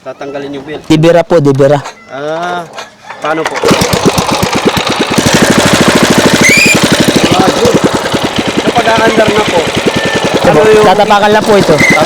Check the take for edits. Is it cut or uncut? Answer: cut